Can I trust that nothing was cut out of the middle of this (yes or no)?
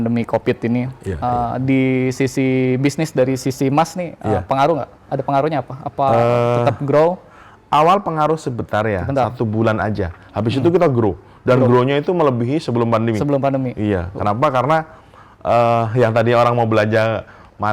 yes